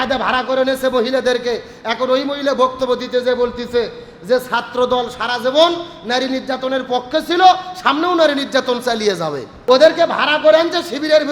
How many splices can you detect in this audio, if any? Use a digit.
1